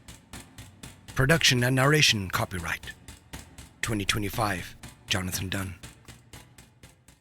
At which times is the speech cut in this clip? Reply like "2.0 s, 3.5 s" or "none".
5.8 s

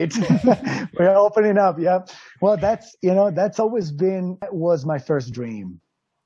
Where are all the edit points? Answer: 4.5 s

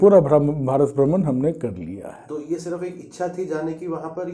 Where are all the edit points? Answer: none

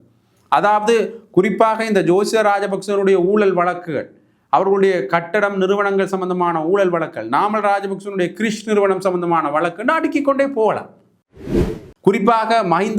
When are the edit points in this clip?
11.4 s

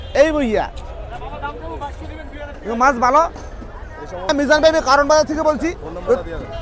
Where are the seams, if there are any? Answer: 4.3 s

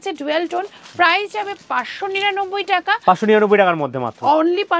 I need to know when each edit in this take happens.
none

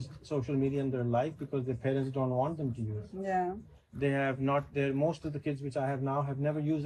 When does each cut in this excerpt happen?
none

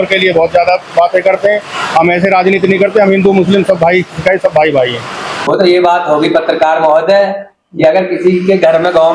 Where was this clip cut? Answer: 5.4 s

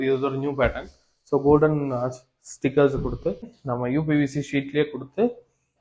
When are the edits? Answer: 3.6 s

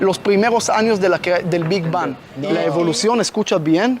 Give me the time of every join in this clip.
2.3 s

